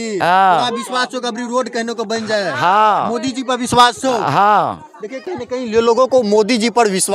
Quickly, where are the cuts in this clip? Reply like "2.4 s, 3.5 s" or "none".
none